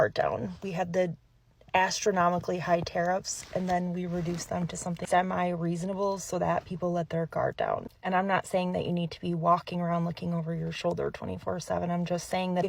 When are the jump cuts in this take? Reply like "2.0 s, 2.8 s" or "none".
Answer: none